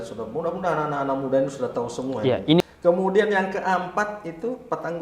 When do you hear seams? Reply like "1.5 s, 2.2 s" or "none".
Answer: 2.6 s